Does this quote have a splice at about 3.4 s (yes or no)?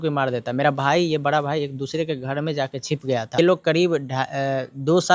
yes